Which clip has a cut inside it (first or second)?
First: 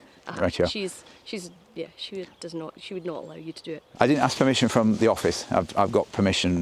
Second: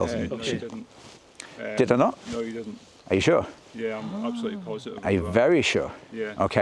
first